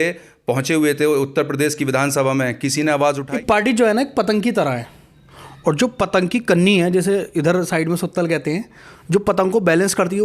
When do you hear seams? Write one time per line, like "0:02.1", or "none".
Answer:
0:03.2